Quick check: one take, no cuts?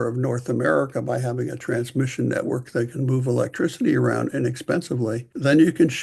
yes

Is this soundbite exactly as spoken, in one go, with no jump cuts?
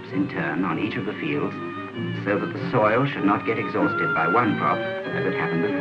no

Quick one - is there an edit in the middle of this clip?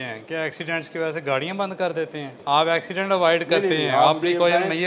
yes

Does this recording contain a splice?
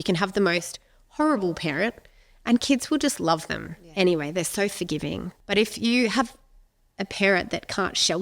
yes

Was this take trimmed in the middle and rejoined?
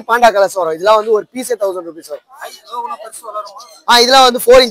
no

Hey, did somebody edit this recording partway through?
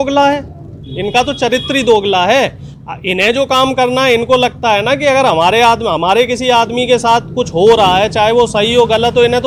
no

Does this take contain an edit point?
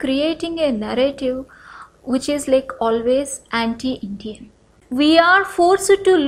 yes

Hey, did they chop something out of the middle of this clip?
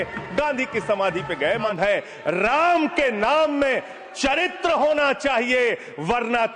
yes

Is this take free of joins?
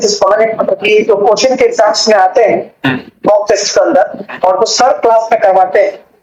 yes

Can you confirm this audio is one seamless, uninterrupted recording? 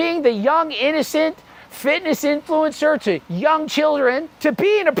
yes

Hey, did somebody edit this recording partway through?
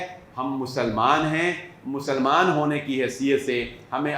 no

